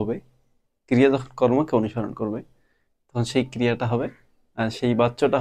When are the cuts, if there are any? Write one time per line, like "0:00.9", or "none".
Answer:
none